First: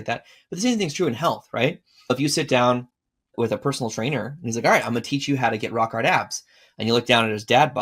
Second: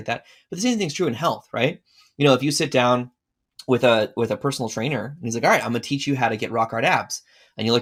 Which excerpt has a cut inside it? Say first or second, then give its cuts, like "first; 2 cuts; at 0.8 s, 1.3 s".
first; 2 cuts; at 2.1 s, 3.3 s